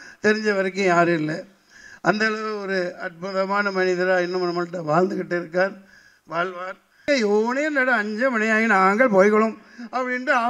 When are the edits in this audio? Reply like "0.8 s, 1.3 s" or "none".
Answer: 7.1 s